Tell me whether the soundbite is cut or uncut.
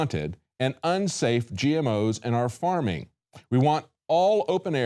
cut